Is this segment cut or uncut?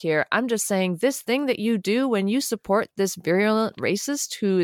uncut